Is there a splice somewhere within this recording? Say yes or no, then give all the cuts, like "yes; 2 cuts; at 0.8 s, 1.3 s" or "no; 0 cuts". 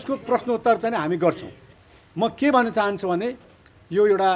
yes; 1 cut; at 1.7 s